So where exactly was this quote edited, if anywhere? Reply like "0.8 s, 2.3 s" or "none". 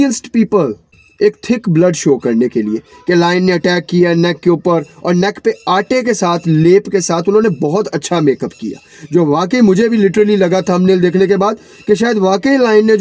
1.0 s